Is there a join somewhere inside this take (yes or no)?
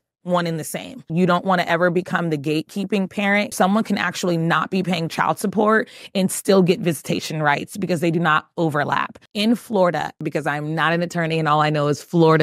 yes